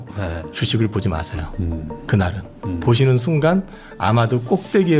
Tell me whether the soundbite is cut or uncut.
uncut